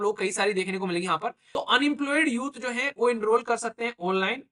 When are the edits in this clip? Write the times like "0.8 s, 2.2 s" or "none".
1.4 s